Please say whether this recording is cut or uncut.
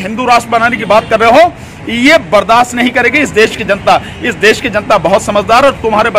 uncut